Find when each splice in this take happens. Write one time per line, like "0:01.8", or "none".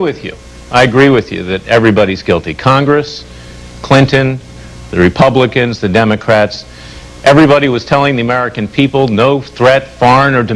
none

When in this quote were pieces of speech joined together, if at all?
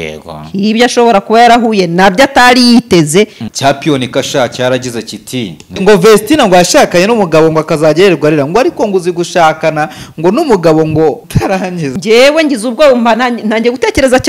0:03.4
0:05.8
0:11.7

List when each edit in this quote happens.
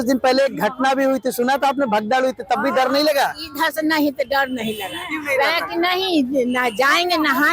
none

